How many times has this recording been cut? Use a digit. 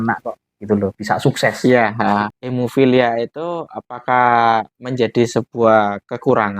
1